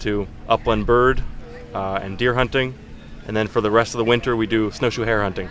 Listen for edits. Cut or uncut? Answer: uncut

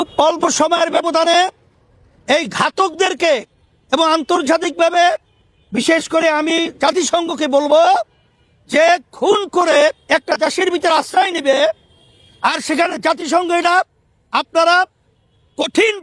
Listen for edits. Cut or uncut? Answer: uncut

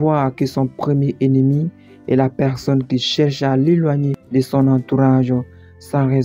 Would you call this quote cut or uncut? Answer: uncut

